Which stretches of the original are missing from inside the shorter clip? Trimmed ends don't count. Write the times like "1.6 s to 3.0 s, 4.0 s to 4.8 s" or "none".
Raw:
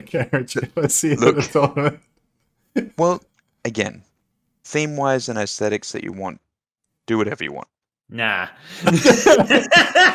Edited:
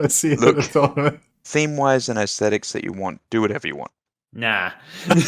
2.1 s to 4.5 s, 6.4 s to 7.0 s